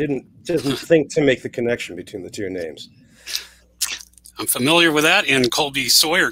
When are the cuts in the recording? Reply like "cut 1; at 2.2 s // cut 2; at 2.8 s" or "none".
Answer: none